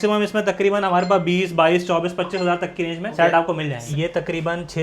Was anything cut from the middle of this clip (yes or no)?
yes